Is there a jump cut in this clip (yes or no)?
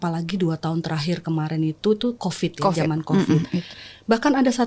yes